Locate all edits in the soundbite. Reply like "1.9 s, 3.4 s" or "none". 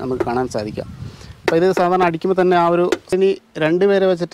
3.1 s